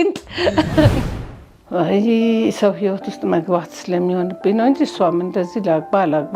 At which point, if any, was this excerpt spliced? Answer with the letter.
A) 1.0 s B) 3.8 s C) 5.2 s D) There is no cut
A